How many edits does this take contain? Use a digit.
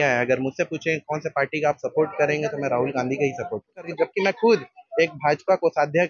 1